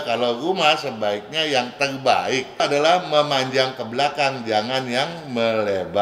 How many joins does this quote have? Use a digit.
1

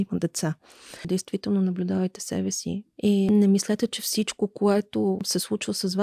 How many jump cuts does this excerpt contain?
3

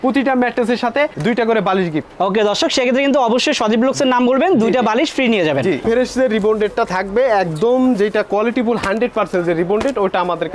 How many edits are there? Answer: 1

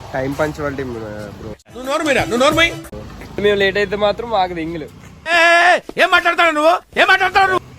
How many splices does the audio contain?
1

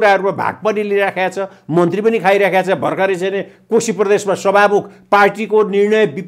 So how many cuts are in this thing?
0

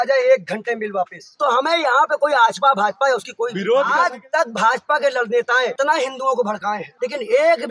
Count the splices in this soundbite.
4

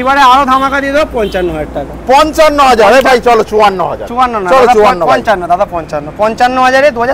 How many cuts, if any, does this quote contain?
0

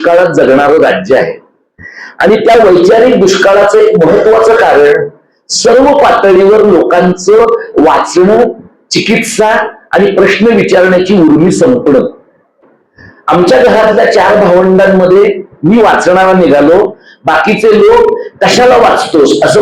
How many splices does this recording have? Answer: 1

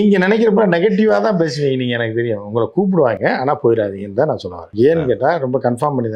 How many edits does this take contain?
1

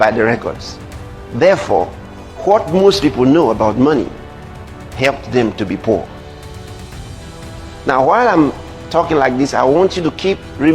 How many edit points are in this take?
2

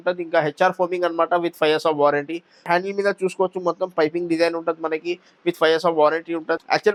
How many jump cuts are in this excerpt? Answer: 0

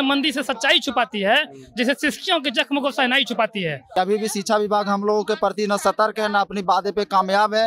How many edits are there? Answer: 1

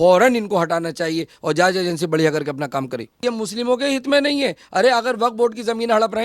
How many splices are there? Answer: 1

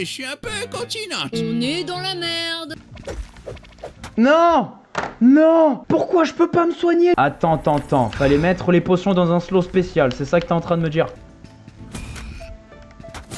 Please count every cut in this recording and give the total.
2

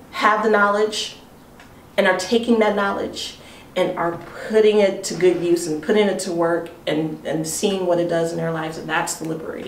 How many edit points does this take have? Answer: 0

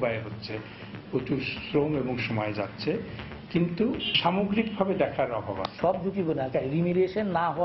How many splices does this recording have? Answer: 2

